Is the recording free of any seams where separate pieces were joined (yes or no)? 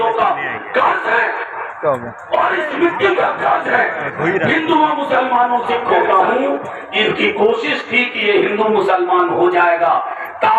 no